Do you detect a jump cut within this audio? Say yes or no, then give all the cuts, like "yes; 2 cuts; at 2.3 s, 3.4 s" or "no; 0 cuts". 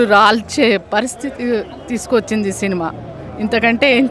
no; 0 cuts